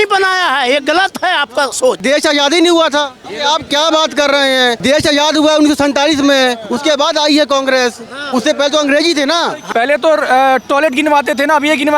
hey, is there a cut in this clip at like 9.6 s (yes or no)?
yes